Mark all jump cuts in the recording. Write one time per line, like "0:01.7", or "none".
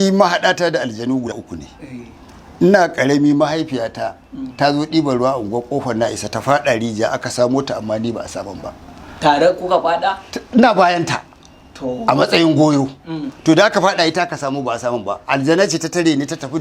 0:01.4